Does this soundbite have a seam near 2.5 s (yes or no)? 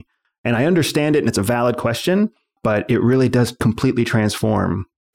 yes